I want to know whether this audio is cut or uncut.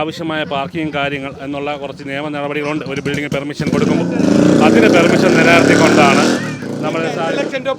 uncut